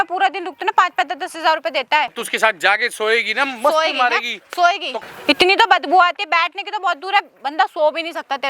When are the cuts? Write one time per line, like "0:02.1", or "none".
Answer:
0:02.2
0:05.0

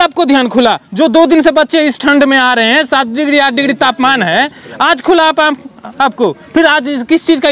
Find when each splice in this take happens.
none

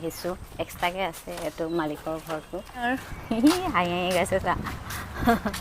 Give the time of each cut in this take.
0:02.8

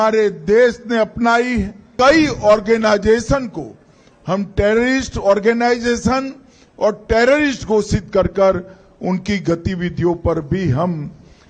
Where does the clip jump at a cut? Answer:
0:01.9

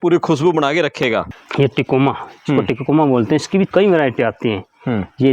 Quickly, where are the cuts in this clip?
none

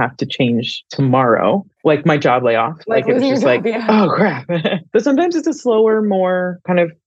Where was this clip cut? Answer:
none

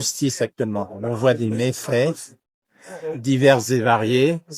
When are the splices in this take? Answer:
none

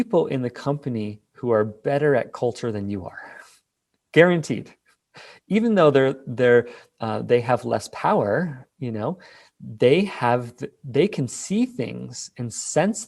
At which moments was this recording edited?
none

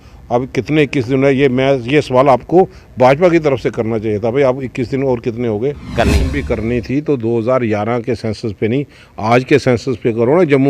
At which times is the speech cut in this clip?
0:05.9

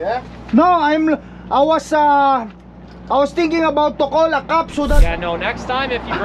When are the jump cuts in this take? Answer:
0:05.0

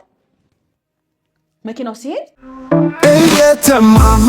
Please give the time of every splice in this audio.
0:02.5

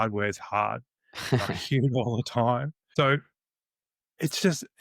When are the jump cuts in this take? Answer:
0:02.8

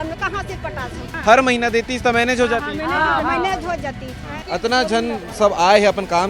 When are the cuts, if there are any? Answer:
0:01.1
0:04.4

